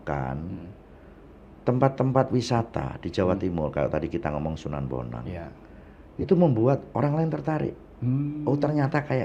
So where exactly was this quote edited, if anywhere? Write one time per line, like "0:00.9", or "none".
none

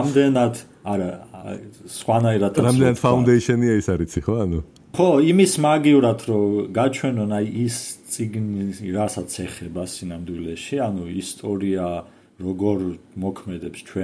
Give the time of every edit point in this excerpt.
0:05.0

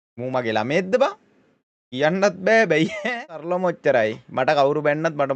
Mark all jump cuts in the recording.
0:03.5

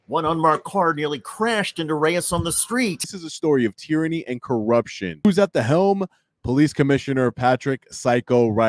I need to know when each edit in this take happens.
0:03.2
0:05.2

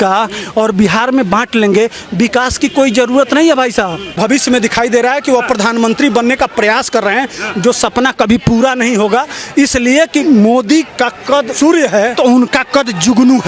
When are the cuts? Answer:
0:04.1
0:10.2
0:11.5
0:12.1

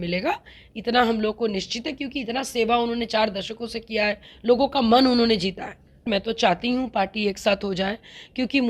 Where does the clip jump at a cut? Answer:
0:06.1

